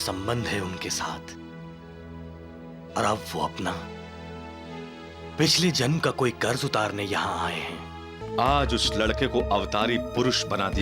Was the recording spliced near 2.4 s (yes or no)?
no